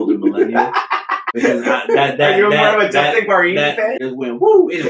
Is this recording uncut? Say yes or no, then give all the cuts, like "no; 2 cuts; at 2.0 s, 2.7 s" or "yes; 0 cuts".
no; 2 cuts; at 1.2 s, 4.0 s